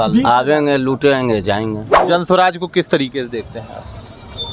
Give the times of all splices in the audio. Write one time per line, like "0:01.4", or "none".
0:02.0